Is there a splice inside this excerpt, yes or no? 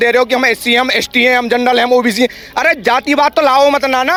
no